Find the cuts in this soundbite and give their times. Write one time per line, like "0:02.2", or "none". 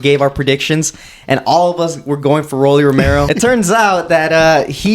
0:03.3